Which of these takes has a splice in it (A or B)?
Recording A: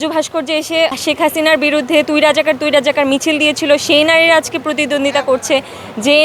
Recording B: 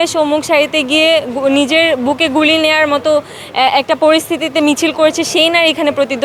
A